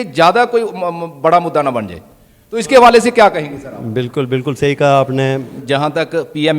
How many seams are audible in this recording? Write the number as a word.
one